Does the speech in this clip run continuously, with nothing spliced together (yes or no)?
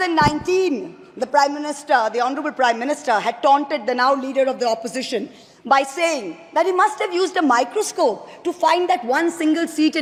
yes